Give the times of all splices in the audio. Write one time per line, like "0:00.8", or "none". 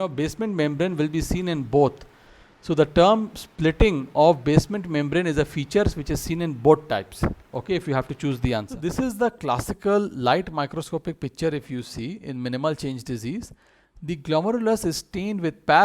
0:08.7